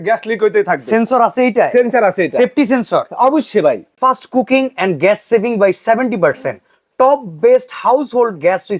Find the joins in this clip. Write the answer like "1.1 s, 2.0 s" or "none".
3.9 s